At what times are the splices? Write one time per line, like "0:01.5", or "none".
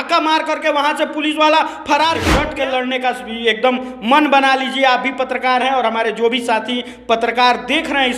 0:02.5